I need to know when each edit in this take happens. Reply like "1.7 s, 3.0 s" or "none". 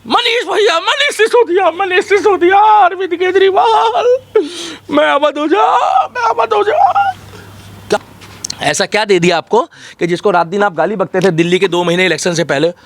8.0 s

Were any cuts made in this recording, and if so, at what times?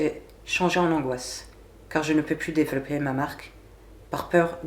none

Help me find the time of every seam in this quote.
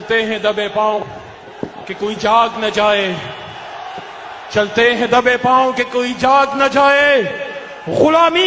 1.0 s

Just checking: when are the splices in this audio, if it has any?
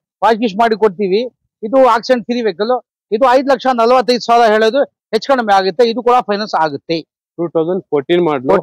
none

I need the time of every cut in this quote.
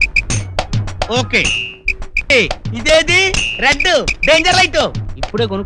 2.3 s

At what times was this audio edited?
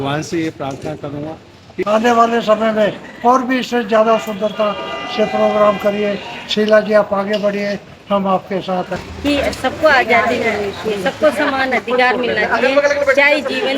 1.7 s, 9.0 s

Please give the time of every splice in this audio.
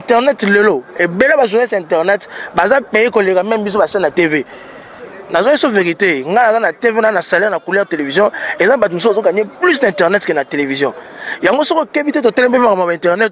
none

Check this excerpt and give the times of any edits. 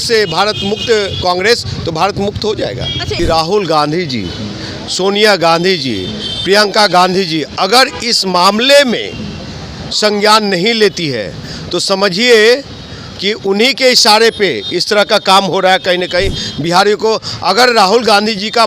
3.1 s

